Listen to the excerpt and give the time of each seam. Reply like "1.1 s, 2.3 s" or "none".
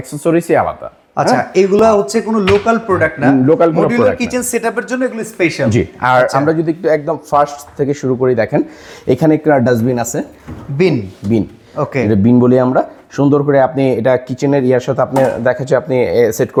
none